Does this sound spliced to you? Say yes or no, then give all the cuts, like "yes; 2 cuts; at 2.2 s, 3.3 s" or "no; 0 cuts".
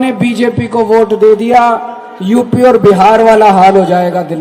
no; 0 cuts